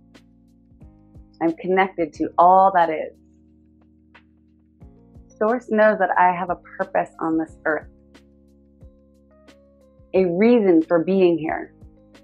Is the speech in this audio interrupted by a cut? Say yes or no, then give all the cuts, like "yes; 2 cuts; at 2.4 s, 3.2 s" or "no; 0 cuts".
no; 0 cuts